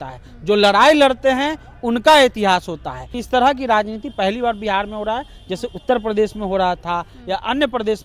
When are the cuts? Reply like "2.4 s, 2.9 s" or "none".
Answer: 3.1 s